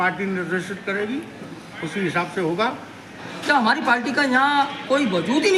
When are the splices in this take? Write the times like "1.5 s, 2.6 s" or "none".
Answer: 3.3 s